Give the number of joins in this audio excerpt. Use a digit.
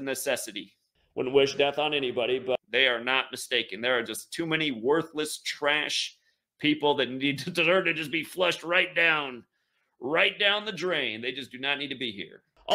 0